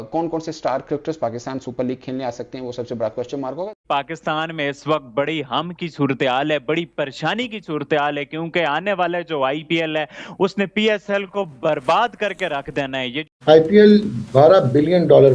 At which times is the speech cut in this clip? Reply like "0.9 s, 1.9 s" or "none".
3.8 s, 13.3 s